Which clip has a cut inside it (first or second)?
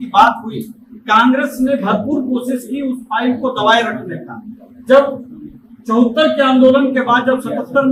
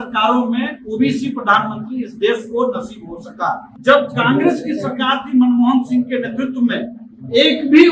second